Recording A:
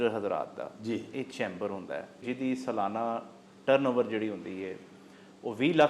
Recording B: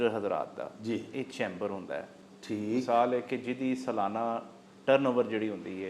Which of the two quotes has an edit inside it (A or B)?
A